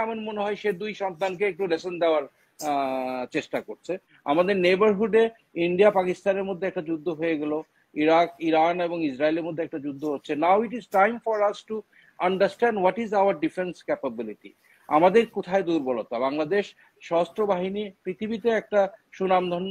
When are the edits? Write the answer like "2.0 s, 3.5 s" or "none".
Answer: 4.1 s